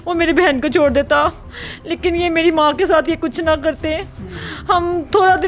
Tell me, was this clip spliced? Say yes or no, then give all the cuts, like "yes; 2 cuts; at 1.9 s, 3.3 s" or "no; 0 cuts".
no; 0 cuts